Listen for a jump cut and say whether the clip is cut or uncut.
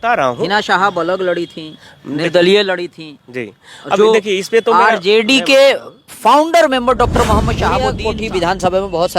cut